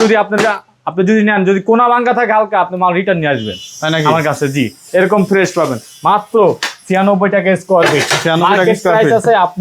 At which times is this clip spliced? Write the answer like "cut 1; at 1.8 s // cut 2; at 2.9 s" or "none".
none